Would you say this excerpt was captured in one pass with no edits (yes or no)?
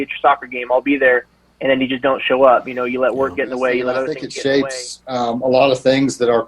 no